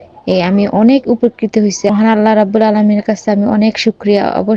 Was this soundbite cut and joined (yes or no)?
yes